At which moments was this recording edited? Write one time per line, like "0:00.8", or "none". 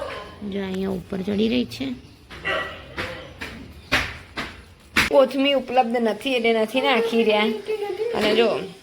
0:05.1